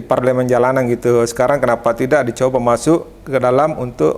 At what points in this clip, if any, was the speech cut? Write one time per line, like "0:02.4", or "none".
none